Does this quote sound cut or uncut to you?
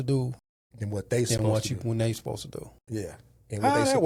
uncut